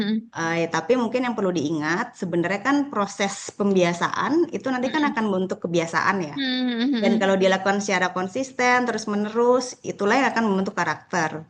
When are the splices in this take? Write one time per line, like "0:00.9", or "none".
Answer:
none